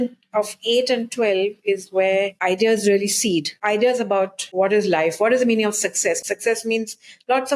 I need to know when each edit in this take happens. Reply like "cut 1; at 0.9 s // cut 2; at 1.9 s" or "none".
cut 1; at 2.3 s // cut 2; at 3.5 s // cut 3; at 4.4 s // cut 4; at 6.2 s